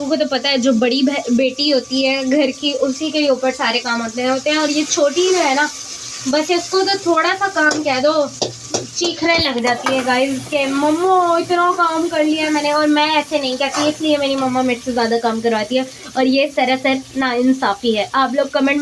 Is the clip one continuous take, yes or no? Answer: yes